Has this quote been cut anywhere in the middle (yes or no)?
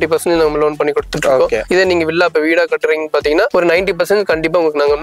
no